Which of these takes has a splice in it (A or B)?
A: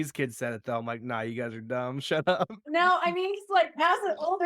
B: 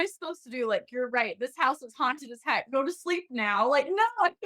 A